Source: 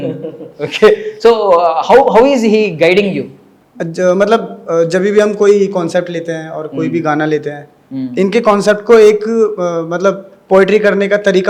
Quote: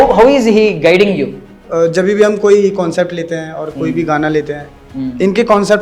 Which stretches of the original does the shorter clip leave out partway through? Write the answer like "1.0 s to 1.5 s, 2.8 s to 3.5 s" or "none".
3.6 s to 4.6 s